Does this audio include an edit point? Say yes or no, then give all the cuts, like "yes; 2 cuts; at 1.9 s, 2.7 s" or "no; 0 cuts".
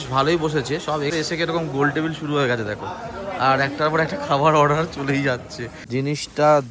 yes; 2 cuts; at 1.1 s, 5.8 s